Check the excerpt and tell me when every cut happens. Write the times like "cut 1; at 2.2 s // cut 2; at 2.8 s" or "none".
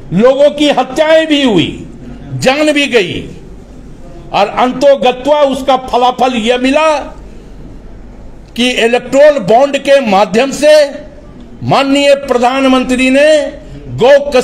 none